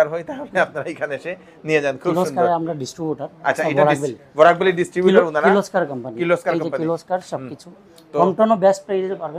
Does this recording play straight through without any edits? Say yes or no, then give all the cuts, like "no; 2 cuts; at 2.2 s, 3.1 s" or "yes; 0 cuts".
yes; 0 cuts